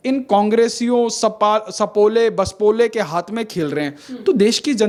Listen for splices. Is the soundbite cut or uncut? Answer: uncut